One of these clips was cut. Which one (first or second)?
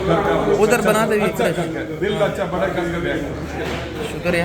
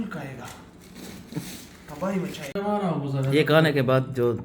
second